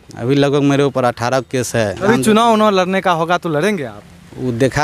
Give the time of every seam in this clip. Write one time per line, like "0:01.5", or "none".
0:02.0